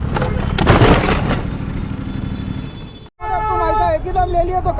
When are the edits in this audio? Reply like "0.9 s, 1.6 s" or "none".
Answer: 3.0 s

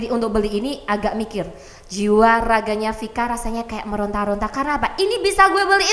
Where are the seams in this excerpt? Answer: none

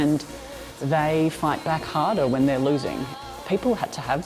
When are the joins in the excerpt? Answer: 3.1 s

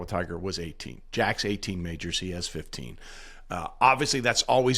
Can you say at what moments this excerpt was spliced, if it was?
none

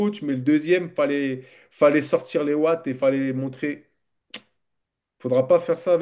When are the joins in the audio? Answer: none

